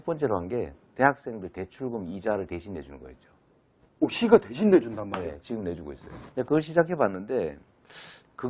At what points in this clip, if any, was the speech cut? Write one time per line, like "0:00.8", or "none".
none